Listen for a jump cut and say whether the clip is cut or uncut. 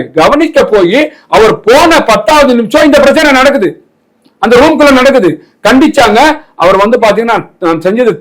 uncut